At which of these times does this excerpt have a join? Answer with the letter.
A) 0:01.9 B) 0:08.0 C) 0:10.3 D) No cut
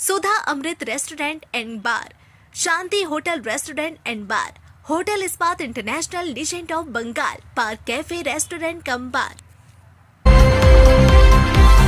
C